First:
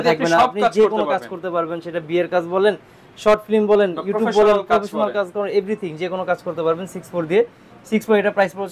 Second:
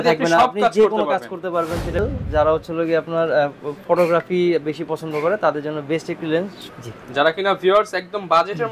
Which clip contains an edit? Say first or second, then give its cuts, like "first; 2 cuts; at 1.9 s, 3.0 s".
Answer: second; 2 cuts; at 2.0 s, 6.6 s